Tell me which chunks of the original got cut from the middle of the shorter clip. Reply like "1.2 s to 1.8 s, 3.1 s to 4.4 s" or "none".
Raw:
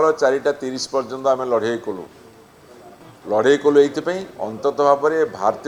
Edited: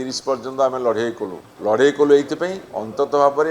2.1 s to 3.1 s